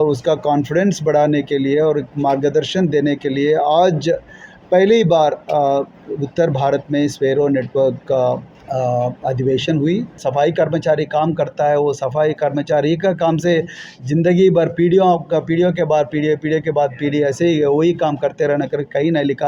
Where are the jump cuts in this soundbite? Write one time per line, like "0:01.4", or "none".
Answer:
0:08.5
0:10.2